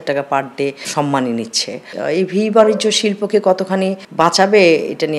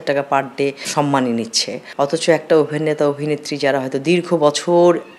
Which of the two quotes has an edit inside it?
first; 1 cut; at 1.9 s

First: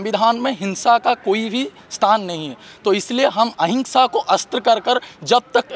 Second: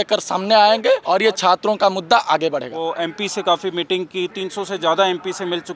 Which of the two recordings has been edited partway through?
second; 2 cuts; at 1.0 s, 2.7 s

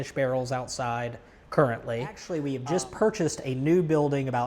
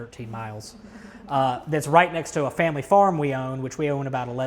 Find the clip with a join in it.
first; 1 cut; at 2.3 s

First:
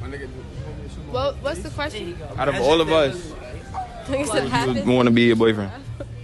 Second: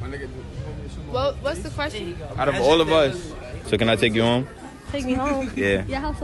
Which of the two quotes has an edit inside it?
second; 1 cut; at 3.5 s

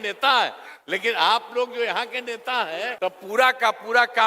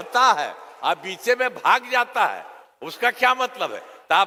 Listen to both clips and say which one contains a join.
first; 1 cut; at 2.9 s

